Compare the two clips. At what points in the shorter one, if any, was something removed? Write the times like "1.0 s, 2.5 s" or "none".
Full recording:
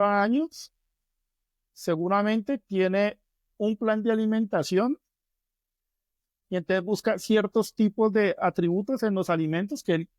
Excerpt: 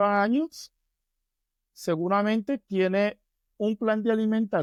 none